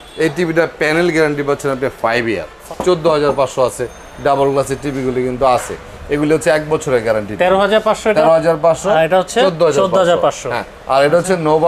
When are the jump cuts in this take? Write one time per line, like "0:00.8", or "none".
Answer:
0:02.6